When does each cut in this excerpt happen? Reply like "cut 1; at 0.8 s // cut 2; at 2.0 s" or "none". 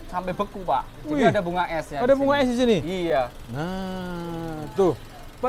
none